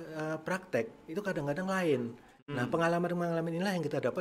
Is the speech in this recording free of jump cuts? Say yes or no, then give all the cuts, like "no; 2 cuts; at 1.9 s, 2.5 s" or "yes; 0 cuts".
yes; 0 cuts